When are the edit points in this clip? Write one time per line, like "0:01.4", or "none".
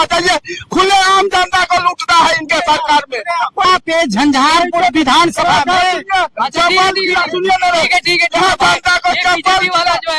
0:03.7